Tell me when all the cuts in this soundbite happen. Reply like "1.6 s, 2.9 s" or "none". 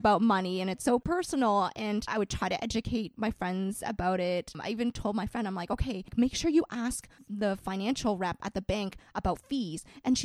1.0 s, 2.1 s, 4.6 s, 6.1 s